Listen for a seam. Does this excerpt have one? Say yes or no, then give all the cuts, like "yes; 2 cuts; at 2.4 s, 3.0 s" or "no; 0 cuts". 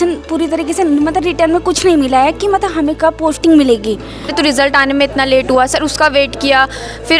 yes; 1 cut; at 4.3 s